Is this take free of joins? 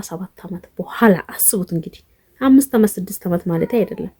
yes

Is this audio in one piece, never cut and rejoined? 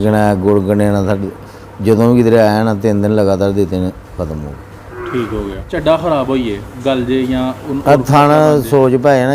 no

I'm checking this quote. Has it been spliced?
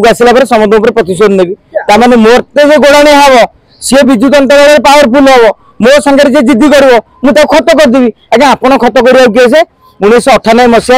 no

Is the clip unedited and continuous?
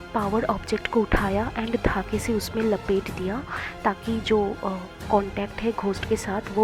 yes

